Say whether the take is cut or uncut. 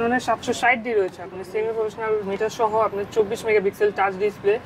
uncut